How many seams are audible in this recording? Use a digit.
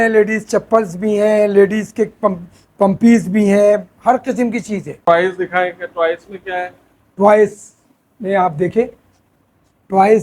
1